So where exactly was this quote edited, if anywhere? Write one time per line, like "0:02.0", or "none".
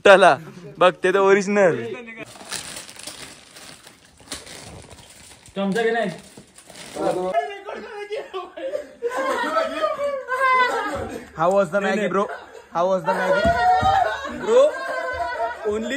0:02.2
0:07.3